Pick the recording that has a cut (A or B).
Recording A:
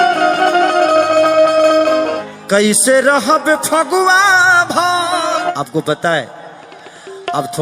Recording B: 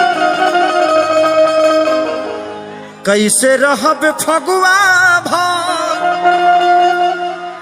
A